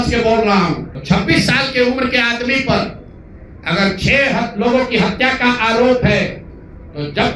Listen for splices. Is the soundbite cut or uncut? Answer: cut